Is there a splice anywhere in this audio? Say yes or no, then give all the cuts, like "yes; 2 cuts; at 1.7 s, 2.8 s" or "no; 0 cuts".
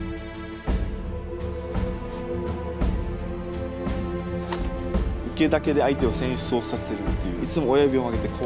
no; 0 cuts